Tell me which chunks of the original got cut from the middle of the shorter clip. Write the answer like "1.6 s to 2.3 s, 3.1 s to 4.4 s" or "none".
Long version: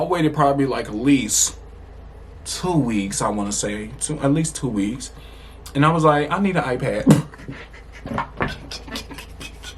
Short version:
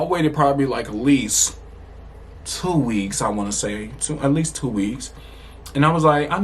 none